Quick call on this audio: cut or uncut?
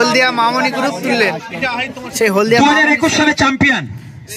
cut